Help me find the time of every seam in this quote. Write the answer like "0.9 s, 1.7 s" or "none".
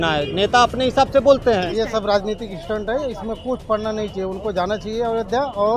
1.7 s